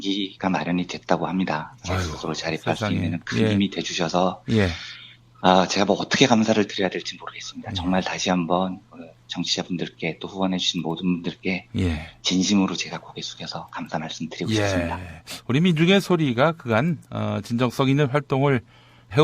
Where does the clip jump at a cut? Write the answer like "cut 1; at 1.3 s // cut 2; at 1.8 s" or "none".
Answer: cut 1; at 8.6 s